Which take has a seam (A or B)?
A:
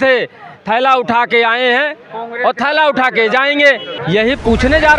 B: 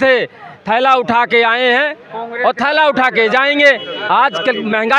A